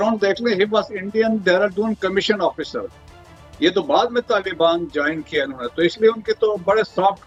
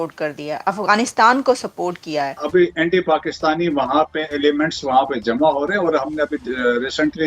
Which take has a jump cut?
second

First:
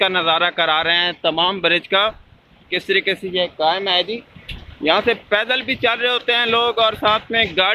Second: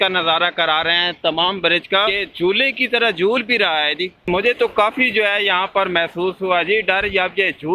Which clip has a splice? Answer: second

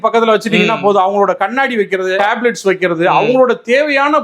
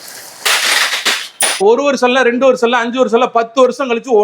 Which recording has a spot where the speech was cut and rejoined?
second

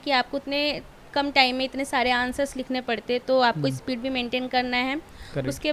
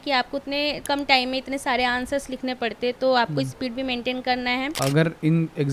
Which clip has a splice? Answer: second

